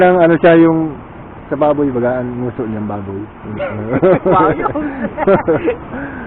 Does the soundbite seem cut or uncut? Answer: uncut